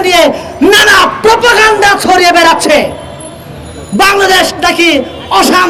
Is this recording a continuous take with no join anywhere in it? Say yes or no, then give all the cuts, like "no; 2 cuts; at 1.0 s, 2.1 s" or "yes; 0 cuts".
yes; 0 cuts